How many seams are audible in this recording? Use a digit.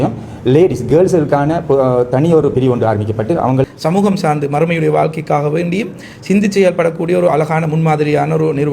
1